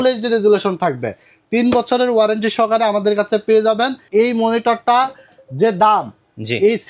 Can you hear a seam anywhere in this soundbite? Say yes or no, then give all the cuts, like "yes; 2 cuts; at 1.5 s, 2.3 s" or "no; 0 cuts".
yes; 1 cut; at 4.0 s